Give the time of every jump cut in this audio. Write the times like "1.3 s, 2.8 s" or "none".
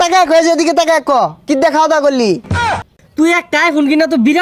2.6 s